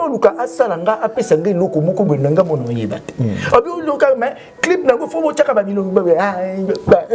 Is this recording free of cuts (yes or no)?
yes